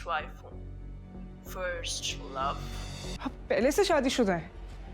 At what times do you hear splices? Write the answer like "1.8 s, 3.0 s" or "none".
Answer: 3.2 s